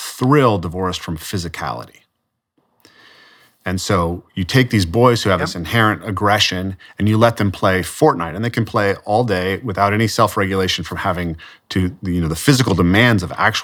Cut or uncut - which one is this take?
uncut